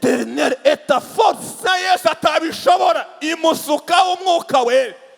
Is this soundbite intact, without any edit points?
no; 1 cut; at 1.6 s

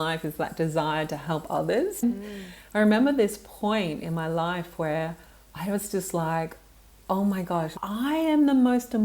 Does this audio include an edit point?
yes; 2 cuts; at 2.0 s, 7.7 s

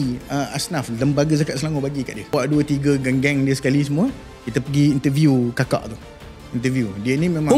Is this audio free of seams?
no; 1 cut; at 2.3 s

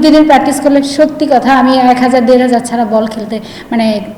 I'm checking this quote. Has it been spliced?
no; 0 cuts

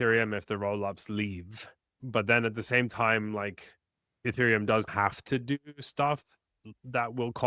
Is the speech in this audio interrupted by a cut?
yes; 2 cuts; at 4.2 s, 4.9 s

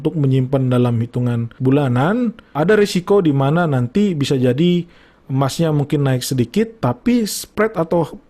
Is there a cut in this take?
yes; 2 cuts; at 1.5 s, 2.5 s

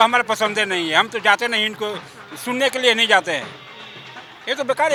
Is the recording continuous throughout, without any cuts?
yes; 0 cuts

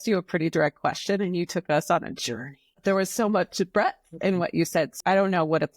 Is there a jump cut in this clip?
yes; 2 cuts; at 2.7 s, 4.8 s

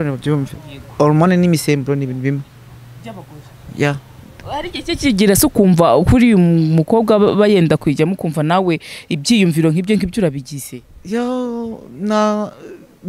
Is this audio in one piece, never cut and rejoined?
yes; 0 cuts

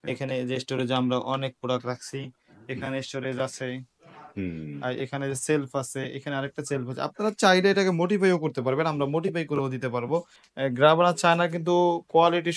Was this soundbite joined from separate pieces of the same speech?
yes; 1 cut; at 10.4 s

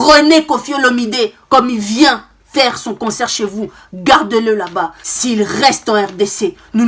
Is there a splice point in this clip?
no; 0 cuts

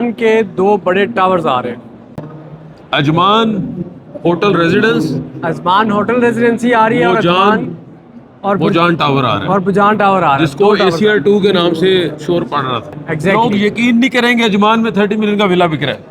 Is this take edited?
yes; 1 cut; at 13.4 s

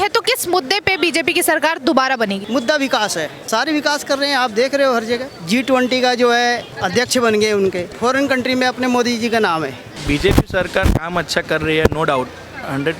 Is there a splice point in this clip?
yes; 6 cuts; at 2.4 s, 3.4 s, 5.3 s, 6.7 s, 7.9 s, 10.0 s

